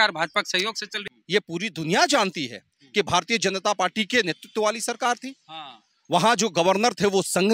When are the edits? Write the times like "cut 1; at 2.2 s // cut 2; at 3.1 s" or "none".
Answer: cut 1; at 1.0 s